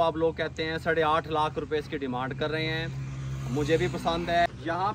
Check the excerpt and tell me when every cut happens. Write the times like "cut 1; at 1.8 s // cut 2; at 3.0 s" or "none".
none